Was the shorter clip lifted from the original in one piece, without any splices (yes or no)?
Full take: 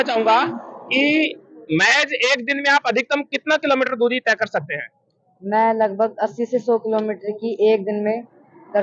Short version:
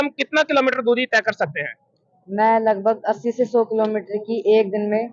yes